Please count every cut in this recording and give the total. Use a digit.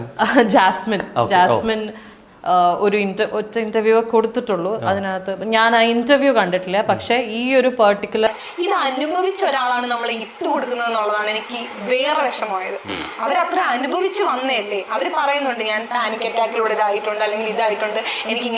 1